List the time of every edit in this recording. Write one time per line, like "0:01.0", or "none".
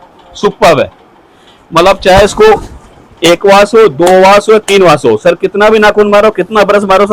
none